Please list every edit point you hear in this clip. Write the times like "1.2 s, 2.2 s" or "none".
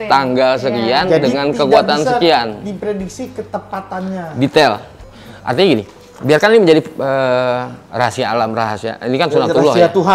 none